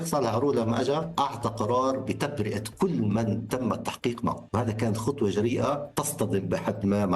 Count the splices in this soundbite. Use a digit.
3